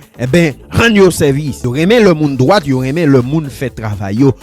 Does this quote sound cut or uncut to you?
cut